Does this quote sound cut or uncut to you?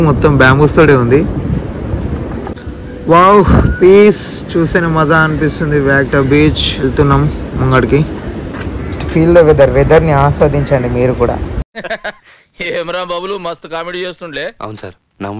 uncut